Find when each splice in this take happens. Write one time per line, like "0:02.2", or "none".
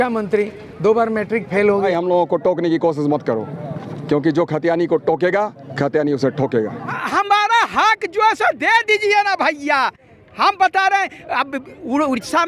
0:01.9
0:06.9